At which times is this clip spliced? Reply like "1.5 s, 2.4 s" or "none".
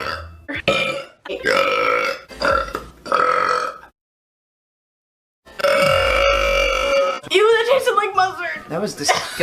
none